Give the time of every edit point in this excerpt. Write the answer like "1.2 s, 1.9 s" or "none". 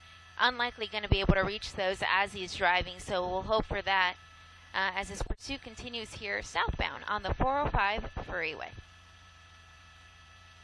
6.5 s